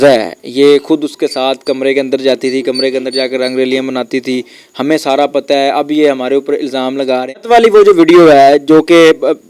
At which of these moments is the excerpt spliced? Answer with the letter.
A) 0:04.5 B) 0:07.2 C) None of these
B